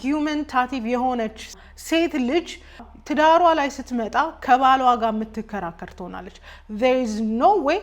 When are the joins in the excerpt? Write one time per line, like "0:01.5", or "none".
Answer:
0:01.6
0:02.9